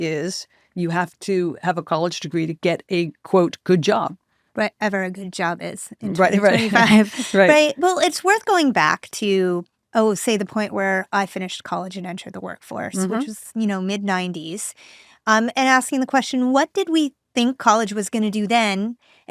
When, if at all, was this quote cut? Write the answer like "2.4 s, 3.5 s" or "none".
none